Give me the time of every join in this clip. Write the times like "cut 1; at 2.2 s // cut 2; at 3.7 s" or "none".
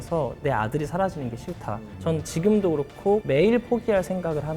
cut 1; at 1.8 s // cut 2; at 3.2 s